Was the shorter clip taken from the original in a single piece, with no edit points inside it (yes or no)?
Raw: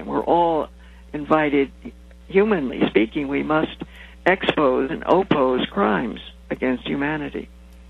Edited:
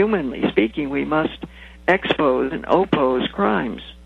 yes